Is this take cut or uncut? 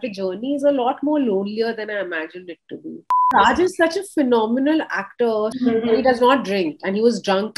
cut